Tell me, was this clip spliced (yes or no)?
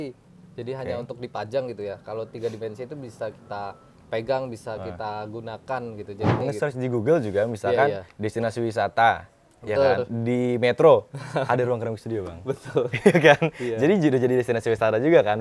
yes